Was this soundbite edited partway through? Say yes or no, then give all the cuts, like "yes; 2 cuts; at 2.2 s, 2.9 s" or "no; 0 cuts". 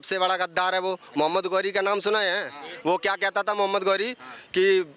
no; 0 cuts